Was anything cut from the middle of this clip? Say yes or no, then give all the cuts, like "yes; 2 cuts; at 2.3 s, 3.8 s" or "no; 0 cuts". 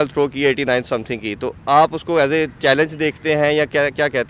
no; 0 cuts